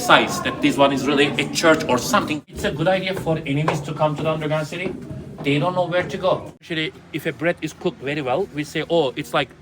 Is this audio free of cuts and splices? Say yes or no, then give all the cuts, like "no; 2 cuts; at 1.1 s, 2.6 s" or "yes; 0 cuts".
no; 2 cuts; at 2.4 s, 6.6 s